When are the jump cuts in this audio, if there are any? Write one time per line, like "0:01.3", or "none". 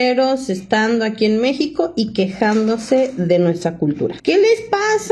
0:04.2